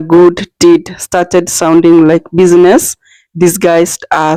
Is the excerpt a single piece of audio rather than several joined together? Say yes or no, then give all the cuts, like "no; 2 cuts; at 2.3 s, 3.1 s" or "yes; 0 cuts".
yes; 0 cuts